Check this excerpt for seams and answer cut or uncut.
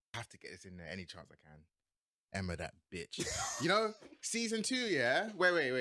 uncut